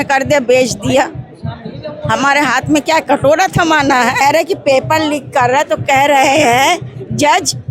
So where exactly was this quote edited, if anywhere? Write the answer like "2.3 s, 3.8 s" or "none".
4.2 s